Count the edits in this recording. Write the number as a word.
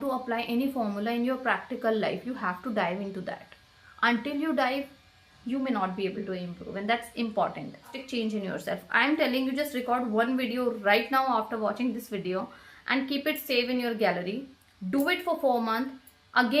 one